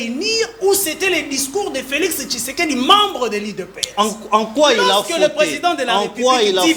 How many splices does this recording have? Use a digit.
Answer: 0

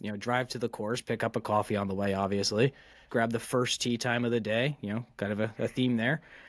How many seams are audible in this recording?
1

